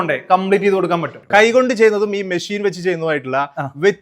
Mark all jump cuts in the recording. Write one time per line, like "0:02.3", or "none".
0:01.1